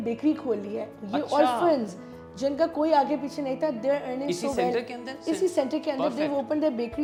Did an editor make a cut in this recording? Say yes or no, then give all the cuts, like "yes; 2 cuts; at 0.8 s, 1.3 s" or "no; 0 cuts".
no; 0 cuts